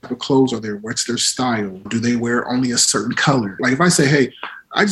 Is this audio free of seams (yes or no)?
no